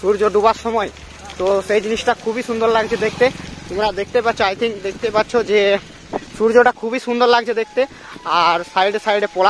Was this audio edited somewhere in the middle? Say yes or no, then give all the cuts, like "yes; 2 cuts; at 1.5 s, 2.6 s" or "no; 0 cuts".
no; 0 cuts